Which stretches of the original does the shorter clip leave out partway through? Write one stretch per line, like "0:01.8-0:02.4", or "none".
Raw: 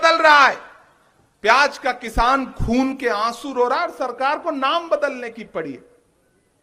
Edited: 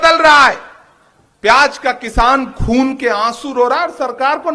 none